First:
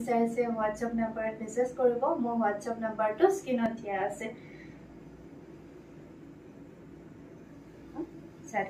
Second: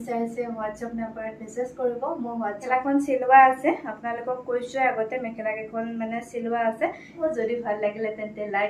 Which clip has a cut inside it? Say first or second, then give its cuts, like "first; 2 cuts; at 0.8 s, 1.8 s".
second; 2 cuts; at 2.7 s, 7.3 s